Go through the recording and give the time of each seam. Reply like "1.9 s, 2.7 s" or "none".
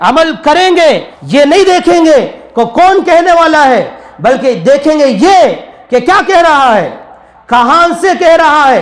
1.1 s